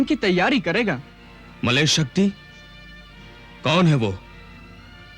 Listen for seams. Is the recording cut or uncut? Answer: uncut